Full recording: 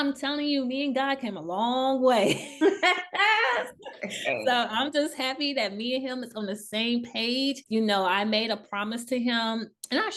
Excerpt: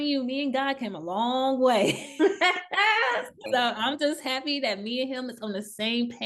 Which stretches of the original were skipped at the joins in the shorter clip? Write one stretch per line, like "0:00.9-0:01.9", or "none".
0:03.9-0:04.4

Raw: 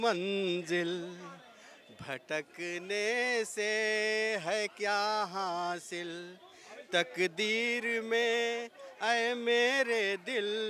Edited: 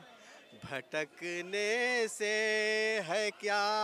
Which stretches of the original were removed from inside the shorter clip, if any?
none

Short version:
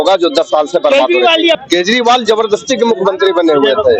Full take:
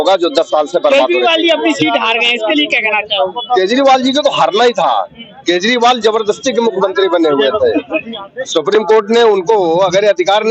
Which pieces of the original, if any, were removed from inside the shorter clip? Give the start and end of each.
0:01.6-0:05.3

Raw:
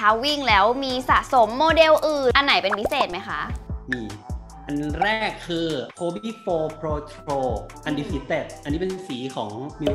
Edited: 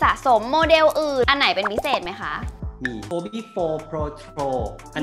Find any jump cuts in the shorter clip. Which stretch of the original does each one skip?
0:04.1-0:05.9

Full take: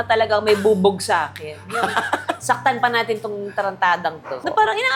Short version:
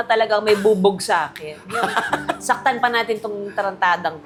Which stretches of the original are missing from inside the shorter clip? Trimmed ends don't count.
none

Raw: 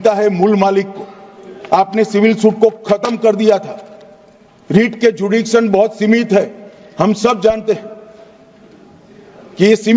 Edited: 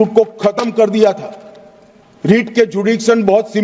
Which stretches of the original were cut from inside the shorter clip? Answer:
none

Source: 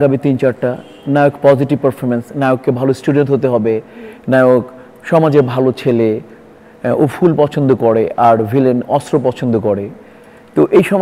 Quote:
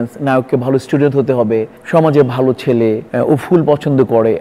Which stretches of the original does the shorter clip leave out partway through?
0:03.9-0:04.9
0:06.2-0:06.8

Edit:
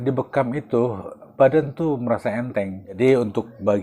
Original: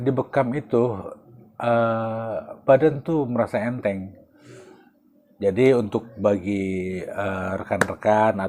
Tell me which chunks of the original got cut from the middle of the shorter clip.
0:01.2-0:02.5
0:04.2-0:05.5

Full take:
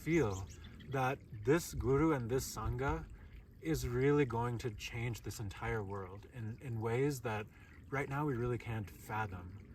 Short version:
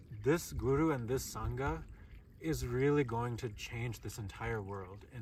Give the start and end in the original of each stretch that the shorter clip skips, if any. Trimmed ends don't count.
none

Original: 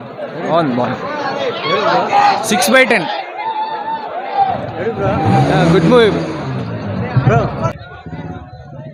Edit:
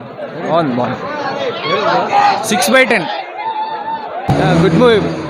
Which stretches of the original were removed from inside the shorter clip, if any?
0:04.3-0:05.4

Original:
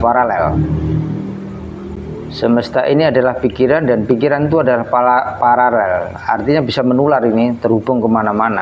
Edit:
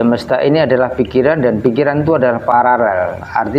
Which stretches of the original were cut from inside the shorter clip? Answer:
0:05.0-0:05.5

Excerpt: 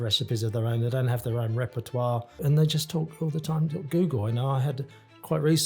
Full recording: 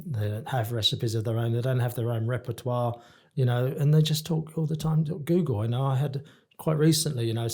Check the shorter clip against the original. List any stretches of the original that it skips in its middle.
0:03.1-0:03.7

